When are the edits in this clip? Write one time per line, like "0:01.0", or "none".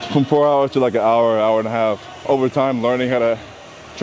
0:02.2

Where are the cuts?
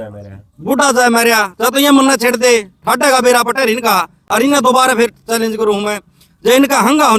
none

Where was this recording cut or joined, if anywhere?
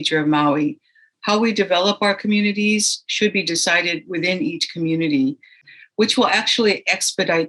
0:05.7

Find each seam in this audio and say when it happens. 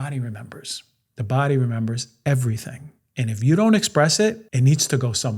0:04.5

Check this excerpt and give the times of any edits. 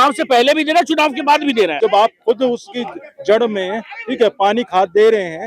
0:01.7

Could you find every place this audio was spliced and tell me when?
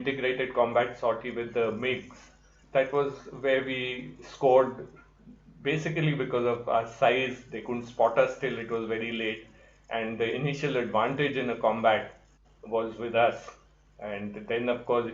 0:02.4

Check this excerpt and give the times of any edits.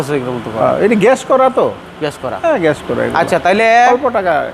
none

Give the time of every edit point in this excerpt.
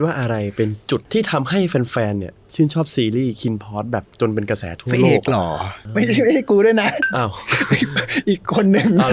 0:01.0
0:05.7

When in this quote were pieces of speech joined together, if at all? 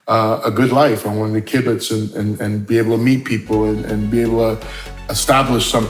none

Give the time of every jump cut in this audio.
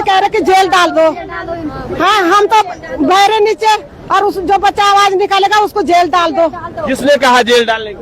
none

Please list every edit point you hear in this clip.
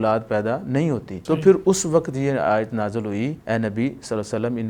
0:01.1
0:03.4

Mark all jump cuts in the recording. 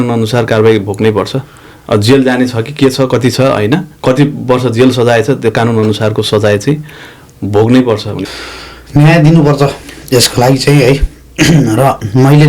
0:08.1

